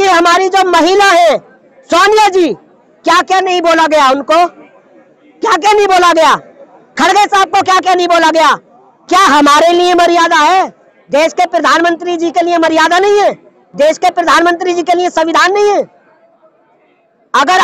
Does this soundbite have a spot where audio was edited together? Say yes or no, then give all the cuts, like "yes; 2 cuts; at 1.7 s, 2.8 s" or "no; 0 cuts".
no; 0 cuts